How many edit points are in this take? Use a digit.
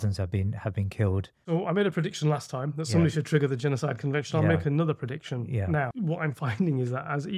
2